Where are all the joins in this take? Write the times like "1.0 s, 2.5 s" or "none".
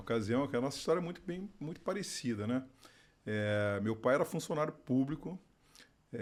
none